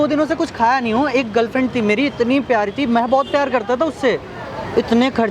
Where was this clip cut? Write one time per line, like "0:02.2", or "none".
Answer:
none

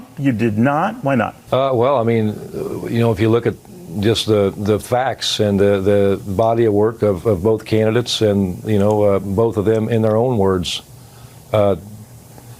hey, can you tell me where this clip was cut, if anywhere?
0:01.4

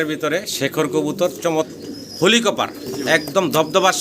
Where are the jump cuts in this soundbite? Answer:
0:01.7

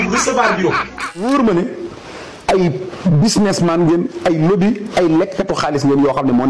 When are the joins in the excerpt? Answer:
0:01.2

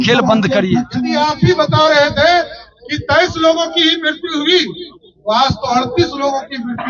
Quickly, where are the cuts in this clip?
0:01.0

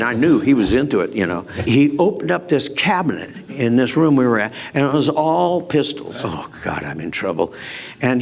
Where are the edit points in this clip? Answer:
0:01.6
0:06.1

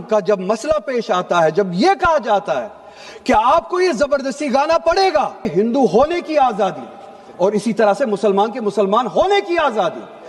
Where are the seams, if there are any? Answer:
0:05.5

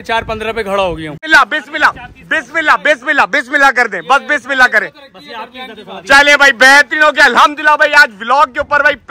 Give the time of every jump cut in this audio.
0:01.2

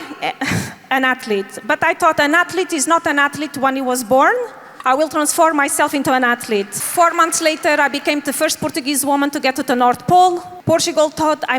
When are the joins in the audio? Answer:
0:04.6
0:06.8
0:10.5

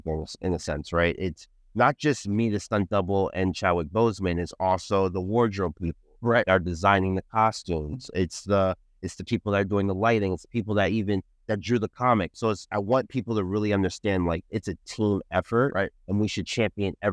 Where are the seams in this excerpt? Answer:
none

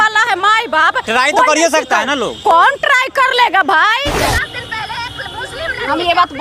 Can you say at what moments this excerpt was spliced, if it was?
0:04.2

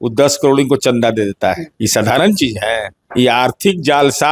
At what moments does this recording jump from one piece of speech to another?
0:01.7
0:03.0

